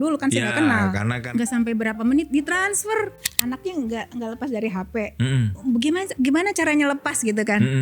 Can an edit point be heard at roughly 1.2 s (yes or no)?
yes